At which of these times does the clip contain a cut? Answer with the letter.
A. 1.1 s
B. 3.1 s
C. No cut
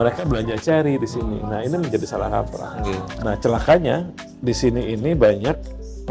B